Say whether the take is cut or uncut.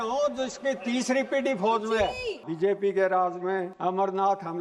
cut